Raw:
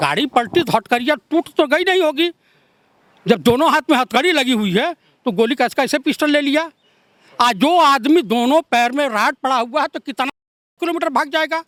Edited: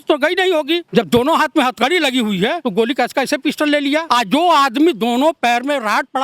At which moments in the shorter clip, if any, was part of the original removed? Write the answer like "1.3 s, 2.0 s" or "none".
0.9 s, 2.6 s, 4.0 s